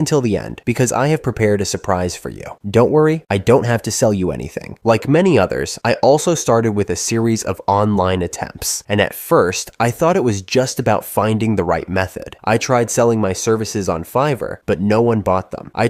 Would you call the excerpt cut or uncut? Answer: uncut